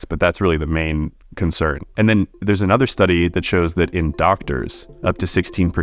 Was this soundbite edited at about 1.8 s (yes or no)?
yes